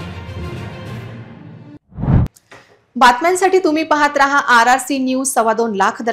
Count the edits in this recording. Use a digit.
0